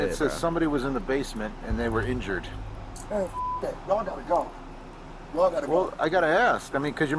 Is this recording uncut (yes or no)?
yes